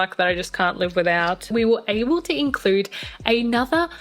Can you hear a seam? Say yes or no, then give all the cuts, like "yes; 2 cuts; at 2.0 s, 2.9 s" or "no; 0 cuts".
yes; 1 cut; at 1.5 s